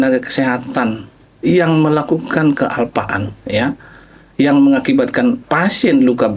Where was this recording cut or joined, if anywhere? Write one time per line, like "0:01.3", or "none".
none